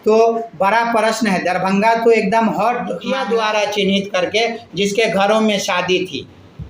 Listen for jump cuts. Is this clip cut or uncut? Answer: cut